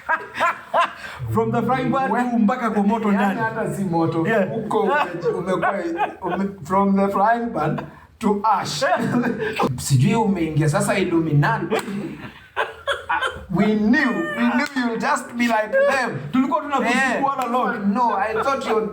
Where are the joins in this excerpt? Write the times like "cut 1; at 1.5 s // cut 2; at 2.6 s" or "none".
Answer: cut 1; at 9.7 s